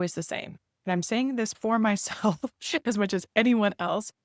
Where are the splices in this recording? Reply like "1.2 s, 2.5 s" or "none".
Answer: 1.5 s